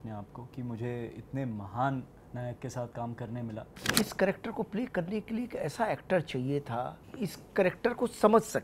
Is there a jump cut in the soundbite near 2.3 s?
no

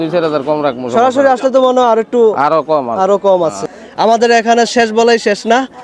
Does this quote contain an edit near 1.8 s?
no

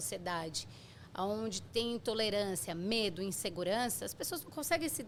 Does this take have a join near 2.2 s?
no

